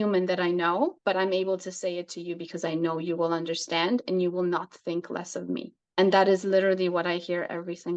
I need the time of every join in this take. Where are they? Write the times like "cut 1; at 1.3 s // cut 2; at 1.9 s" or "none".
cut 1; at 1.0 s // cut 2; at 5.8 s